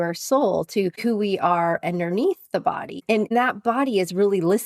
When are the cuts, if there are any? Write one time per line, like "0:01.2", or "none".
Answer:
0:01.0
0:03.0